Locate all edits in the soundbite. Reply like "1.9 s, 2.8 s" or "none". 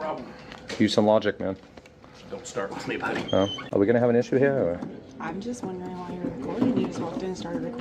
3.6 s